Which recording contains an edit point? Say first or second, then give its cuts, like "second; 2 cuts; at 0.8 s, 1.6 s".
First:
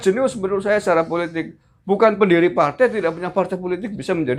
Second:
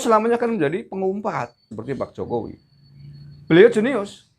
second; 1 cut; at 1.7 s